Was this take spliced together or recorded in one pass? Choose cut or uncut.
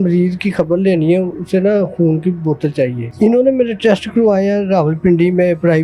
cut